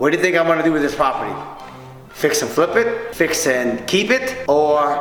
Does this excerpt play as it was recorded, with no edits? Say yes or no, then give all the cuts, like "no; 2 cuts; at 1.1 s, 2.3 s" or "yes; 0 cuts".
yes; 0 cuts